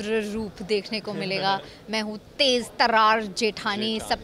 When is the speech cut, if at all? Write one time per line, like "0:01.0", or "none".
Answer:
none